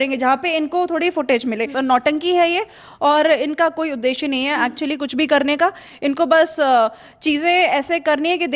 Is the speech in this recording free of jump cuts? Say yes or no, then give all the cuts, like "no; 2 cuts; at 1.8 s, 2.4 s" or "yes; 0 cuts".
no; 1 cut; at 1.7 s